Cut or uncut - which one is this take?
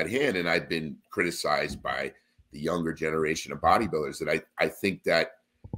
uncut